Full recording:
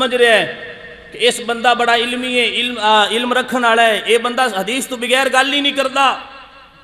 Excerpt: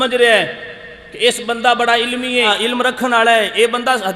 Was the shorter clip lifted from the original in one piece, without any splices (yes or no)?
no